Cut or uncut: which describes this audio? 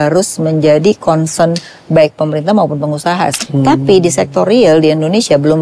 cut